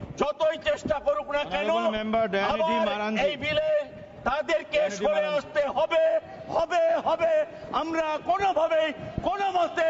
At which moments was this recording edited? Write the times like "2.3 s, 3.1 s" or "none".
none